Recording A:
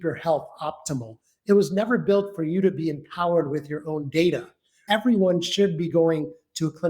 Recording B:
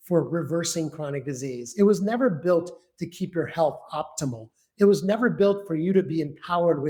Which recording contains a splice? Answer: A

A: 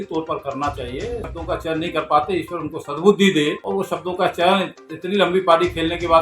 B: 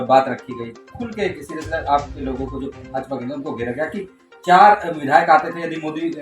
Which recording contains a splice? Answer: A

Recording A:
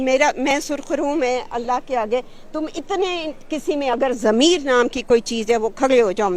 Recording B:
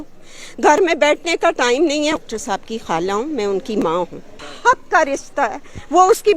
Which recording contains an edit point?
B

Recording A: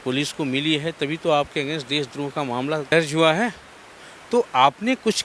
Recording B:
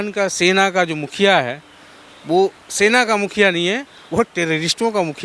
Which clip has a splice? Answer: A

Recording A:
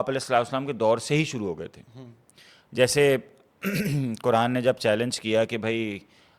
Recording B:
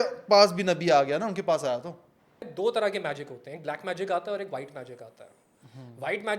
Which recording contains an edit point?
B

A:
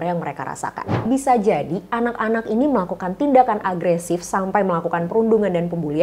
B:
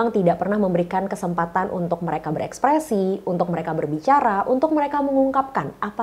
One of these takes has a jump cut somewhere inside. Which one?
A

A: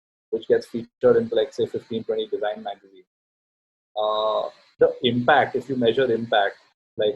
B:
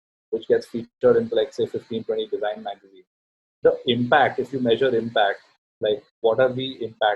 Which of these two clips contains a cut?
B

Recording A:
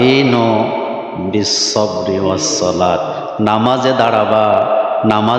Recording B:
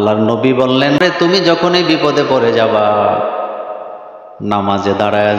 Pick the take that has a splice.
B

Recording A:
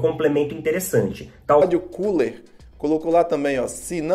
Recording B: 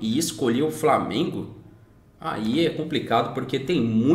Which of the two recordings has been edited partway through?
A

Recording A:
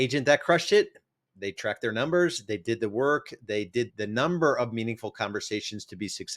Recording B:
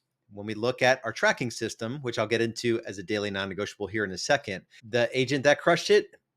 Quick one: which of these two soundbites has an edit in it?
A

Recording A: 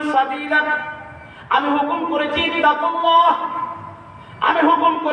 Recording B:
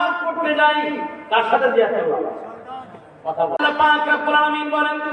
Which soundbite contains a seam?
B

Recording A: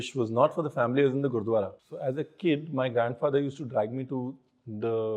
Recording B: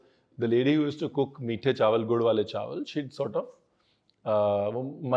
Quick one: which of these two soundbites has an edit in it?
A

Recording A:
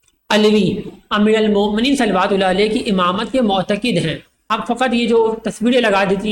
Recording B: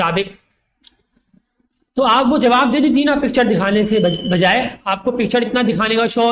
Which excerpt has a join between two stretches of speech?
A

